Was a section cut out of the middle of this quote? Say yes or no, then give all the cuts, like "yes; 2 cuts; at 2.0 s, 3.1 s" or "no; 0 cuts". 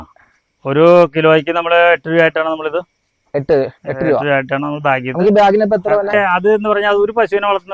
yes; 1 cut; at 6.1 s